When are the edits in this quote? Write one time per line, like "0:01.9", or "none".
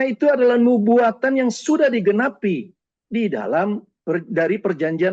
none